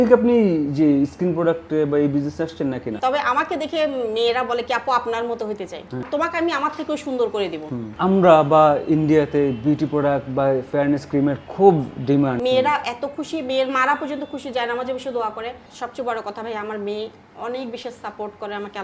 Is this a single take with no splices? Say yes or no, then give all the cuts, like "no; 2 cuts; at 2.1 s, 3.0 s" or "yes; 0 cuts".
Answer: no; 5 cuts; at 3.0 s, 6.1 s, 7.9 s, 12.4 s, 15.6 s